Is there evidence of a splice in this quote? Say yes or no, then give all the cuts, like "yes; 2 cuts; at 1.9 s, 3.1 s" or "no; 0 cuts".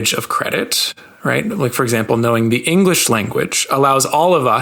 no; 0 cuts